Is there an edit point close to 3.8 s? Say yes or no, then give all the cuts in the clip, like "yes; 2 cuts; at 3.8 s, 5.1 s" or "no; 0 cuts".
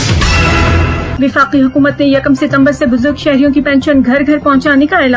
no; 1 cut; at 1.2 s